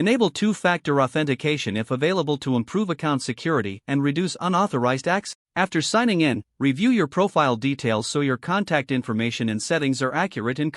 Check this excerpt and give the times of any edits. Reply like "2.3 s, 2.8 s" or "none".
5.3 s